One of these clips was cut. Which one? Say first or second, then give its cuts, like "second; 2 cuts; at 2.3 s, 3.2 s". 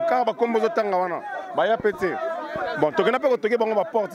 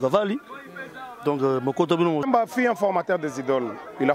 second; 1 cut; at 2.2 s